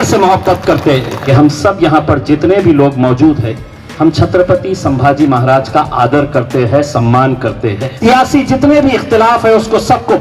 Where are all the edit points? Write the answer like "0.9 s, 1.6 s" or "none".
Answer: 1.3 s, 7.9 s